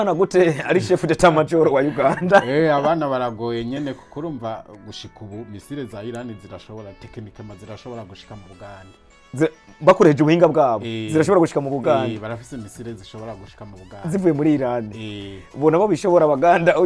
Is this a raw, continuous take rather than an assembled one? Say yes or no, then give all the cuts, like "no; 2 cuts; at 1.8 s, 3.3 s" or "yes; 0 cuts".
yes; 0 cuts